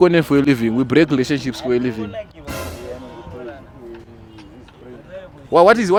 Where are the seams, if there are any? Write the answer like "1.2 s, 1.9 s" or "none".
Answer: none

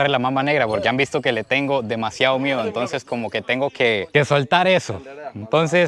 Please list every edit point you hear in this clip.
none

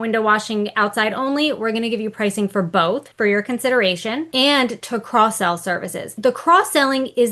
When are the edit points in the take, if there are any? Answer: 3.1 s, 4.3 s, 6.1 s

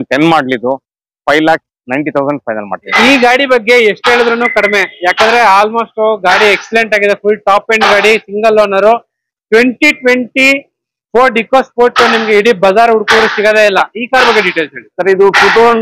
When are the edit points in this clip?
2.9 s

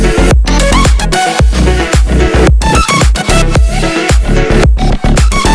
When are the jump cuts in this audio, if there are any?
none

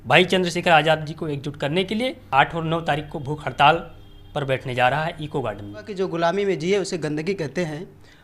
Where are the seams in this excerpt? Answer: 2.2 s, 5.9 s

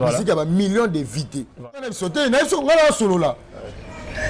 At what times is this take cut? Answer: 1.9 s

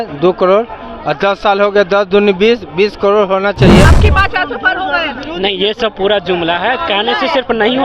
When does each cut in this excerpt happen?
3.8 s

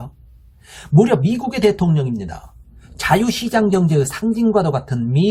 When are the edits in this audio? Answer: none

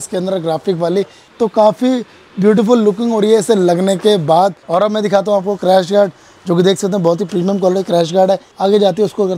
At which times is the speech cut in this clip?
1.2 s, 4.6 s, 8.5 s

